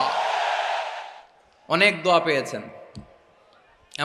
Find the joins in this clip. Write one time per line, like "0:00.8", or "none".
0:00.9